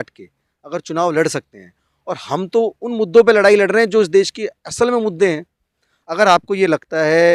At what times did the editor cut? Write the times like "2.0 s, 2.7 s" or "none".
none